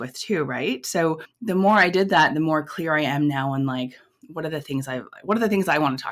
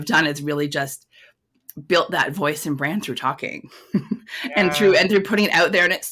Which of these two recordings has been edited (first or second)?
first